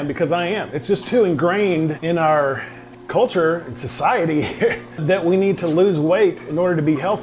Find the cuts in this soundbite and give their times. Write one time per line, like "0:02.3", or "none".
0:02.0
0:05.0